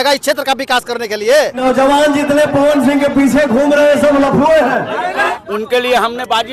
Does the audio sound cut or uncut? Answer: cut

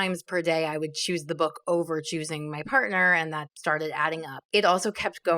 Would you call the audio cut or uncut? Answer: cut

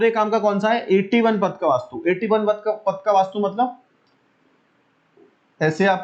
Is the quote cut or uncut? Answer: uncut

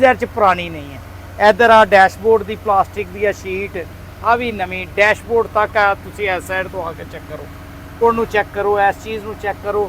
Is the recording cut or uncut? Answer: cut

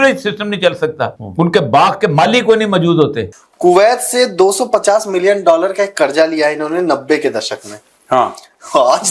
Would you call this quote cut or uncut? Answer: uncut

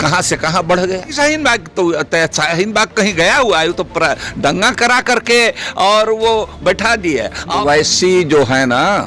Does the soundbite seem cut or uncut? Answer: cut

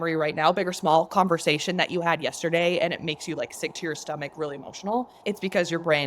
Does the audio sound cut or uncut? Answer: cut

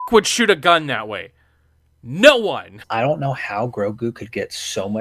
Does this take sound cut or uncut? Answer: cut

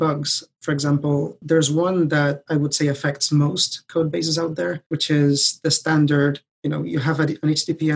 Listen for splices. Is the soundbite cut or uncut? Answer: cut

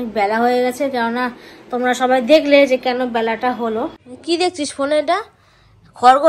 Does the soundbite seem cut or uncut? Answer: cut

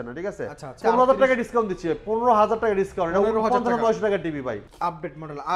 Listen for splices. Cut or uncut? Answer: cut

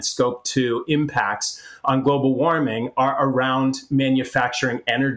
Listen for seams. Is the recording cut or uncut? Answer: uncut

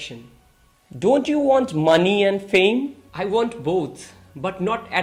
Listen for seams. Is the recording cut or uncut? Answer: uncut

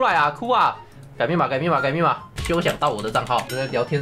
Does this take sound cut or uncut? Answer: cut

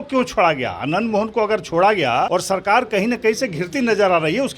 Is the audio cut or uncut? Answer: cut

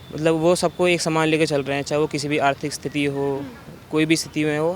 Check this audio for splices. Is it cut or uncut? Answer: uncut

